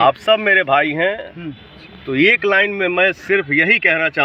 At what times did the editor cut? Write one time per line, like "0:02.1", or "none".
none